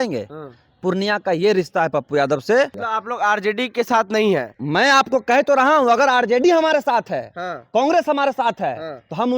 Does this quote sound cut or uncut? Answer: cut